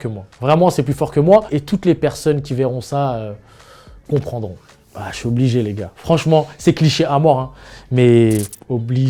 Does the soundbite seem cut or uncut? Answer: uncut